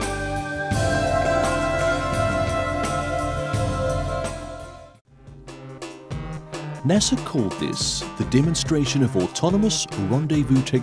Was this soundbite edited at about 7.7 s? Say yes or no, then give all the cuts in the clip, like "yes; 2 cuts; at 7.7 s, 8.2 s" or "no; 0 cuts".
no; 1 cut; at 2.6 s